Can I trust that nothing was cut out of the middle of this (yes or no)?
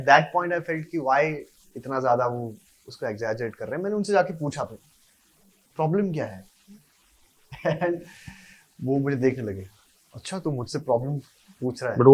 yes